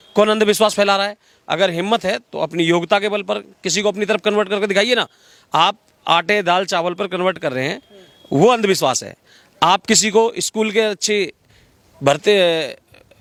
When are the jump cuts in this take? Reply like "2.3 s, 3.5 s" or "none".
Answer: none